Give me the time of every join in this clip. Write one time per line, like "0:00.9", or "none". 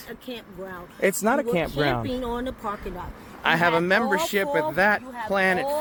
none

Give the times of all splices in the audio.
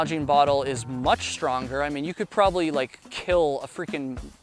none

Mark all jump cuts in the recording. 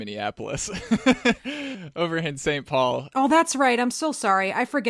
0:03.1

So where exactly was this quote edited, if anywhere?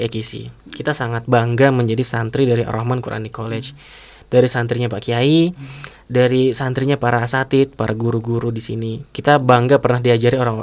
0:09.0

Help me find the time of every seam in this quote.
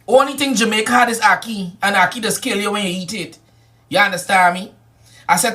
0:03.5

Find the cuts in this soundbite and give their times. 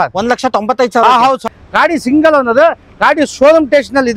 0:01.4

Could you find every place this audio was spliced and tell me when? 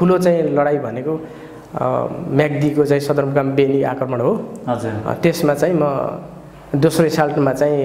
none

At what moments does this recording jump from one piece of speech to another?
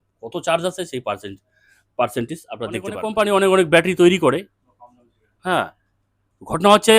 0:03.0

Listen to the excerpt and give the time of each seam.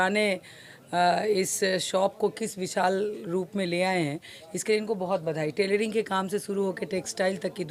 none

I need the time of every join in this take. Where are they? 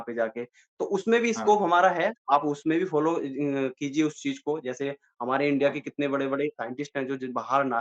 none

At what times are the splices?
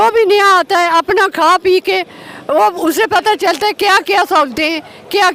none

